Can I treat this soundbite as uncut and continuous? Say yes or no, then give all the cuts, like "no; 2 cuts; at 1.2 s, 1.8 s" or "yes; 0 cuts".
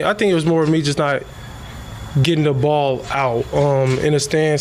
yes; 0 cuts